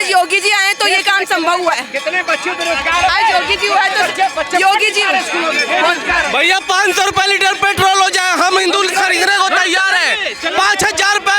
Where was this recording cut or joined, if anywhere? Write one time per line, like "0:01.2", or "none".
none